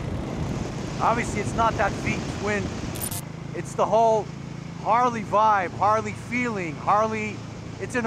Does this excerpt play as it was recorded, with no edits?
no; 1 cut; at 3.1 s

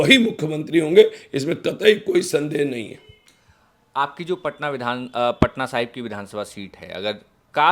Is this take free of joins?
yes; 0 cuts

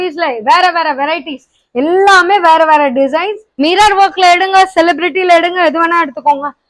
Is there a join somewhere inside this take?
yes; 1 cut; at 3.4 s

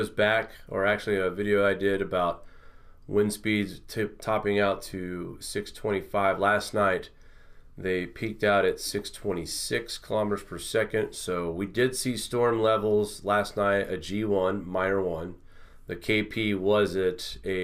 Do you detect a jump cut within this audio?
yes; 1 cut; at 9.1 s

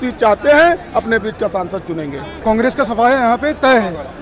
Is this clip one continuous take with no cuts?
yes; 0 cuts

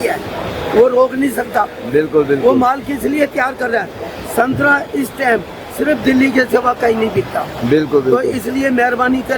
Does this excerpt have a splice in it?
no; 0 cuts

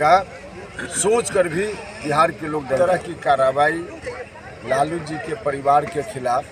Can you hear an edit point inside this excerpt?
yes; 1 cut; at 2.8 s

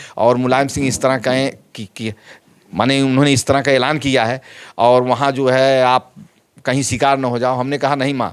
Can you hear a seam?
no; 0 cuts

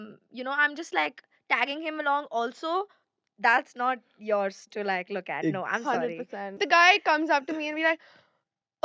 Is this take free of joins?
no; 1 cut; at 6.5 s

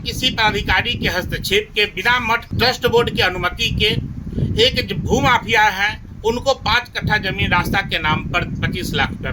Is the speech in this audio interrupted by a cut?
yes; 1 cut; at 2.5 s

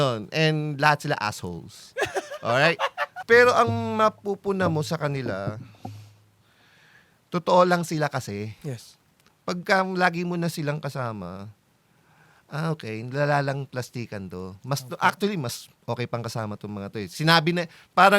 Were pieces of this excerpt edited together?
yes; 1 cut; at 3.1 s

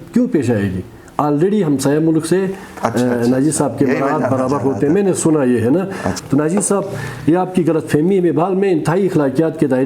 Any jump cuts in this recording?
yes; 1 cut; at 6.1 s

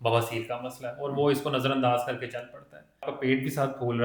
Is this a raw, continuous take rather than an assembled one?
no; 1 cut; at 3.1 s

